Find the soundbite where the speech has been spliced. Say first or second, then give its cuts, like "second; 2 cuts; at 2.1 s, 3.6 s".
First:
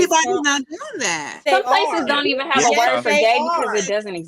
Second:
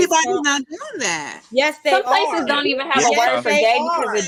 first; 1 cut; at 1.4 s